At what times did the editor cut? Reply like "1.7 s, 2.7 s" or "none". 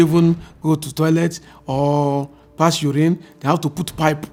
none